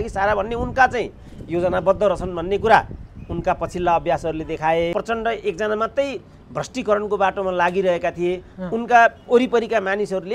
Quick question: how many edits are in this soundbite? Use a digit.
1